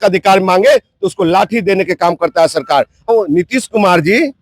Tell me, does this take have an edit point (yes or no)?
yes